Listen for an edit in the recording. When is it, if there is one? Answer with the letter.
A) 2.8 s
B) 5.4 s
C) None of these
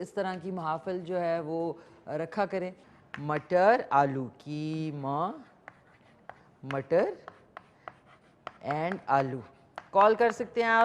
A